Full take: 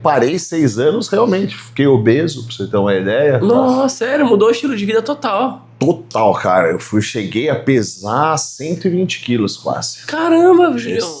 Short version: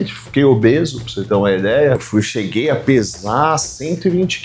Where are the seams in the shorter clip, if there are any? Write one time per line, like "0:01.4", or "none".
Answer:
0:02.0

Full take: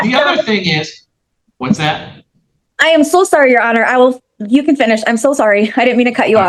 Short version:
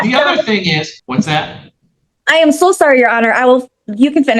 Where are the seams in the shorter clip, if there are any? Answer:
0:01.0

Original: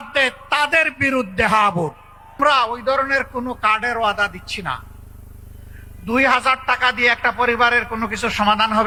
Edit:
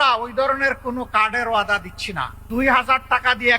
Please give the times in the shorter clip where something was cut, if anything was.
0:02.4

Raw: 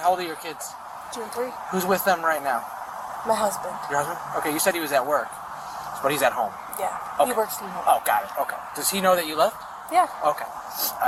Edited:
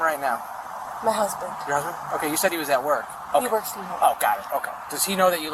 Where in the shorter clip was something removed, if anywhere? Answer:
0:03.2

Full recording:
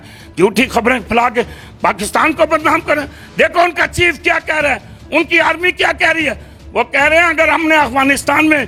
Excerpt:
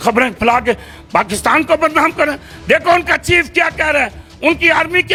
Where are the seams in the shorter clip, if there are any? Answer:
none

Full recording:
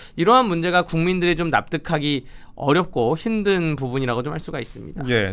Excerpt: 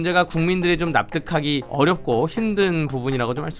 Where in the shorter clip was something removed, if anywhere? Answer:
0:01.7

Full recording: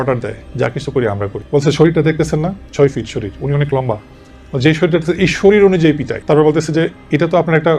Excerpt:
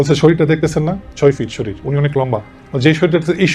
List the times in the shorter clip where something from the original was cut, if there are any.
0:02.6

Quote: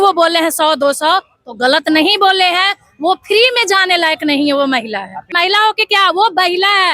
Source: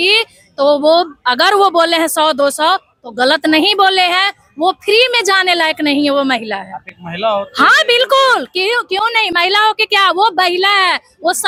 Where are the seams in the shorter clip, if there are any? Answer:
0:05.3

